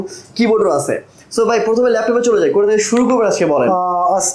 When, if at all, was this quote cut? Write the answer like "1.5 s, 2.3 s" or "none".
none